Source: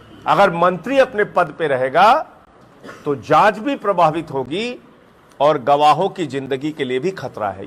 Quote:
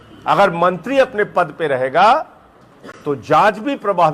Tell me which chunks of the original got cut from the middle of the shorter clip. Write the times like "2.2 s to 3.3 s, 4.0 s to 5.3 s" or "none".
none